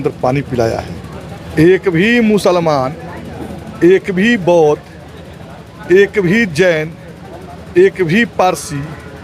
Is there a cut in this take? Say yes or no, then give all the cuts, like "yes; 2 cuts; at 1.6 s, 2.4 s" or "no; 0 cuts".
yes; 1 cut; at 1.0 s